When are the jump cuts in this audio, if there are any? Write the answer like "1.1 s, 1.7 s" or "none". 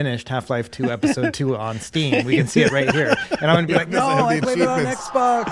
none